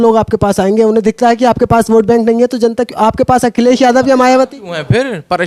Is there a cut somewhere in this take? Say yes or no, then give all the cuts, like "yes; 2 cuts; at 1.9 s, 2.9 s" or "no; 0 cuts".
no; 0 cuts